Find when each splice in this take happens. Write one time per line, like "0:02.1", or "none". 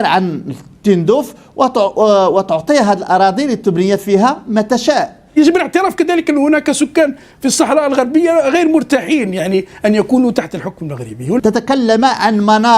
0:05.2
0:11.4